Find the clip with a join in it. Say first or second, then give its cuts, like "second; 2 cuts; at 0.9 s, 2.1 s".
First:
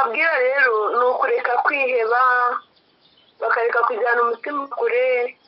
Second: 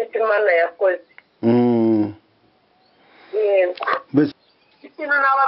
second; 1 cut; at 4.3 s